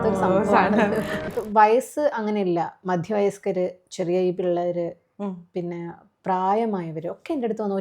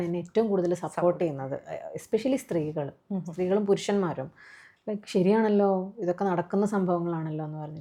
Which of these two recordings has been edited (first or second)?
first